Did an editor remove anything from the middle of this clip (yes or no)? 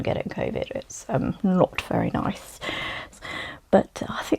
yes